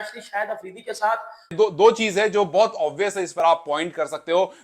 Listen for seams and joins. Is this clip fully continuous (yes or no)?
no